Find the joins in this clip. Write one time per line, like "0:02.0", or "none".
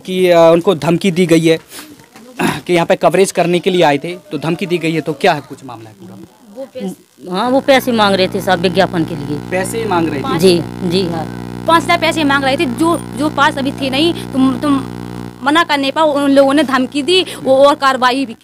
none